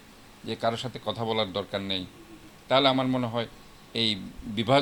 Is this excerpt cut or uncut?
uncut